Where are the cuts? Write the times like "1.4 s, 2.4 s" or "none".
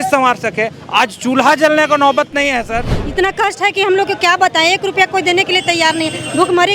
2.8 s